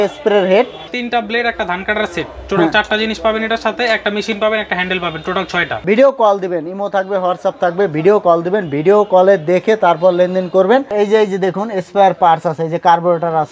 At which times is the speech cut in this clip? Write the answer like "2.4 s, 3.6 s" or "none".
1.0 s, 5.8 s, 10.9 s